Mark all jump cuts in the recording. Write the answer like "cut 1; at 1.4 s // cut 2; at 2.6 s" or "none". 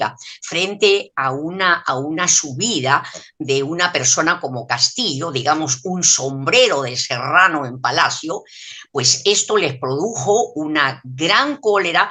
none

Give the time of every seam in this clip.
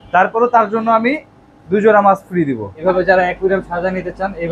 cut 1; at 2.7 s

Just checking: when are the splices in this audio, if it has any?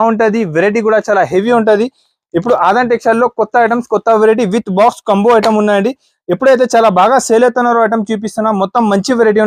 none

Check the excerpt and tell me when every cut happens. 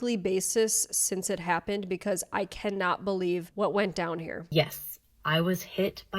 cut 1; at 4.4 s

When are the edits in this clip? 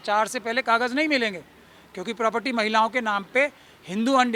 none

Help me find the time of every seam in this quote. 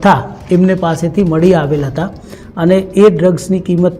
cut 1; at 2.4 s

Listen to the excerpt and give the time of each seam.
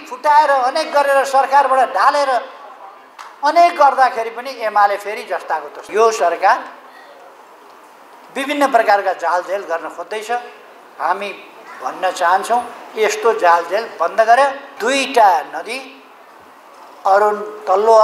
cut 1; at 5.9 s // cut 2; at 14.7 s

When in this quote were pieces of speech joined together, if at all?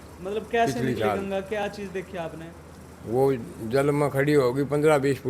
none

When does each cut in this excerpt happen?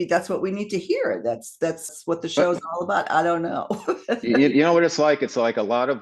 cut 1; at 1.9 s

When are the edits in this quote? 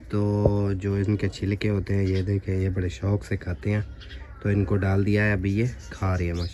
none

